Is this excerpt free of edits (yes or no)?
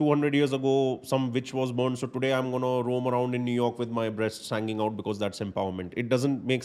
yes